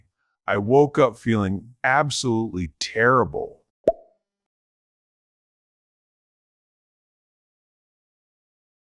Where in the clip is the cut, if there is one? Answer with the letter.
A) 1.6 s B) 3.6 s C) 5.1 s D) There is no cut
D